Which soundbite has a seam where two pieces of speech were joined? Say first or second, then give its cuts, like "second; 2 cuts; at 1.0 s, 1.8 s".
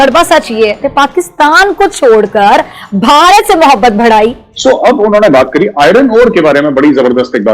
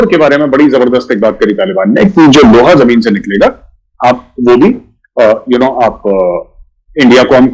first; 2 cuts; at 0.8 s, 4.5 s